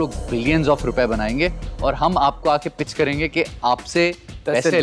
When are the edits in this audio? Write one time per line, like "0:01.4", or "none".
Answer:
none